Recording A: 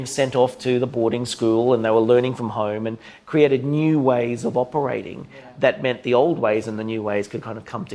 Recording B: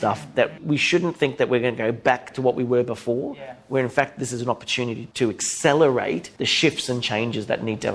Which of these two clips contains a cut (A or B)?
B